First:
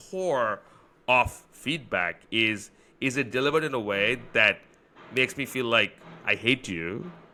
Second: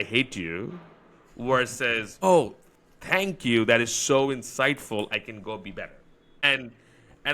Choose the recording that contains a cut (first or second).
second